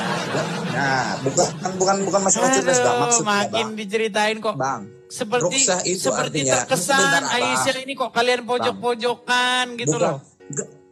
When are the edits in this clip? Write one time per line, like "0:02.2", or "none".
none